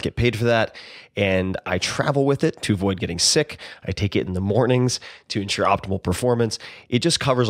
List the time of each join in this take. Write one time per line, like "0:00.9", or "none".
none